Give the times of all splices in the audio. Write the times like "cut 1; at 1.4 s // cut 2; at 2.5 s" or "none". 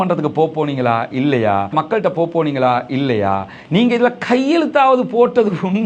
cut 1; at 1.7 s